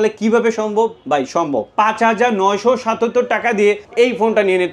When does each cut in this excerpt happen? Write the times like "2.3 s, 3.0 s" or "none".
1.7 s, 3.8 s